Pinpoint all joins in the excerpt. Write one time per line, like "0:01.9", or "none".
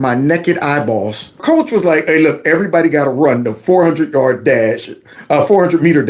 0:01.4